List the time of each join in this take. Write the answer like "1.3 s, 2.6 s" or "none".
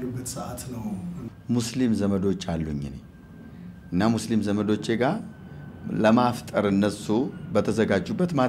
1.2 s

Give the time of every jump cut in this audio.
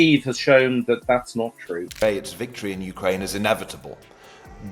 1.9 s

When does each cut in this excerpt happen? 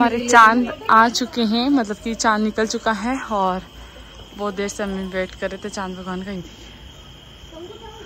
none

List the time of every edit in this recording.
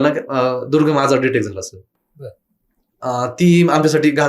none

